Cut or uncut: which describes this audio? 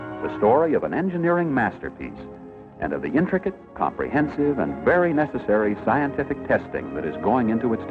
uncut